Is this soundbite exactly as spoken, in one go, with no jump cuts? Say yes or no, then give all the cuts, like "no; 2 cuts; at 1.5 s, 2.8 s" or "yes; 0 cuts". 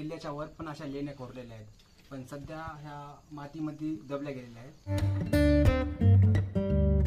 no; 1 cut; at 5.1 s